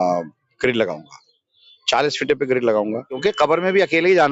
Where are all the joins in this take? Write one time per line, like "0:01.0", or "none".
0:03.2